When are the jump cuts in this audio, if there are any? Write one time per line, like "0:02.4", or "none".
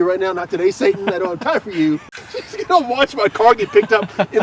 0:02.0